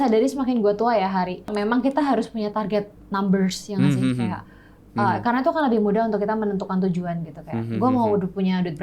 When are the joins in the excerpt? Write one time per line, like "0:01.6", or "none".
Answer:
0:01.5